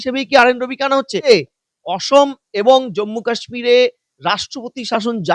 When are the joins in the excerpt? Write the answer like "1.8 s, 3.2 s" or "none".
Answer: 1.3 s